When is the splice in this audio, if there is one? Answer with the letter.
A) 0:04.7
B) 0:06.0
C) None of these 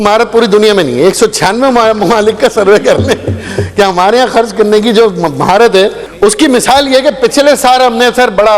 B